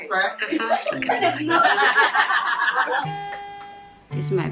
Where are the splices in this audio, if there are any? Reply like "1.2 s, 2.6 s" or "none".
3.0 s